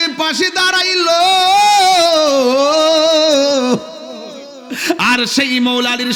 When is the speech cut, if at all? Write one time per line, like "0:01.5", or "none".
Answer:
none